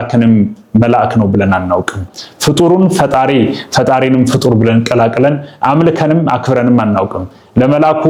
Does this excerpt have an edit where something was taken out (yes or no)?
no